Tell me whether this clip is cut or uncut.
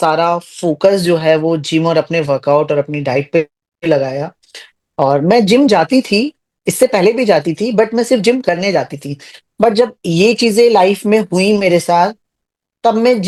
uncut